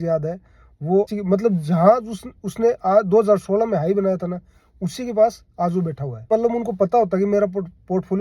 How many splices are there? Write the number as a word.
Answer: two